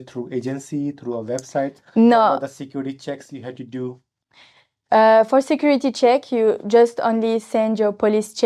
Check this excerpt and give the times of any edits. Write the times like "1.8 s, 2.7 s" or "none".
none